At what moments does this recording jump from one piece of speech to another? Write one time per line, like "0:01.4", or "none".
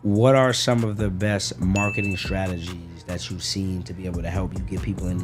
none